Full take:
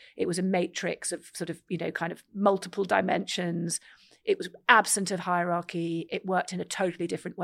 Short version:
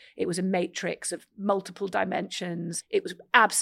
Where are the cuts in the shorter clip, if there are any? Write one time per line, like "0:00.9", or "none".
0:01.3
0:02.8